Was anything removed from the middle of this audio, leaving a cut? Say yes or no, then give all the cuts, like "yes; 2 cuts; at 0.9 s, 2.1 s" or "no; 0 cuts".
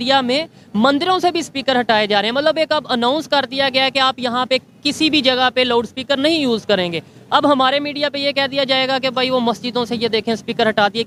no; 0 cuts